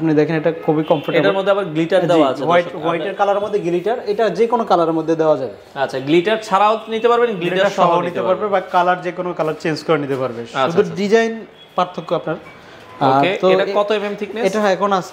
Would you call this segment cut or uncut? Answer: uncut